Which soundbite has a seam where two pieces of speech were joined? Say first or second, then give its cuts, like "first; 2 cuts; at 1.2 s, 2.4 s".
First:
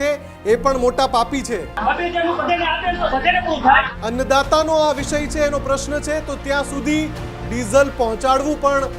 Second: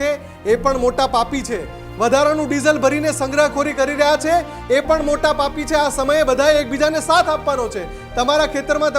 first; 2 cuts; at 1.7 s, 3.9 s